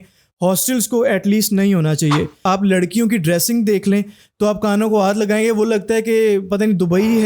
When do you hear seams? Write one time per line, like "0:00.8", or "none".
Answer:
0:02.4